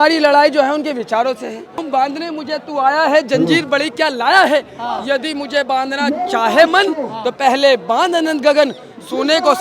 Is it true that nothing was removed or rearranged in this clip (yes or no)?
no